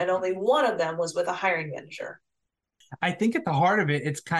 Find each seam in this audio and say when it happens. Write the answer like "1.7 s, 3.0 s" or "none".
2.8 s